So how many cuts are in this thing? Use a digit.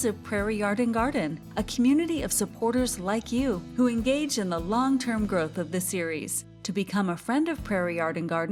0